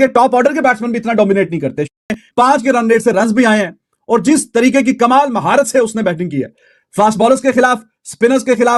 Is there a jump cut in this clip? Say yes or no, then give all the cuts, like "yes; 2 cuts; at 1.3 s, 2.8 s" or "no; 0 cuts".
no; 0 cuts